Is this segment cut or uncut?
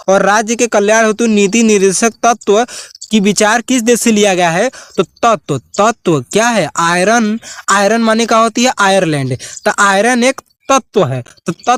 uncut